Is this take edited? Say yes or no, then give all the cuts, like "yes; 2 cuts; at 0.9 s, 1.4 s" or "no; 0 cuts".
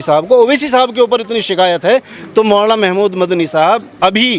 no; 0 cuts